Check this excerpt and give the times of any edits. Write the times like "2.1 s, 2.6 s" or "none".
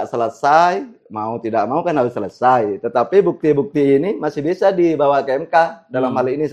none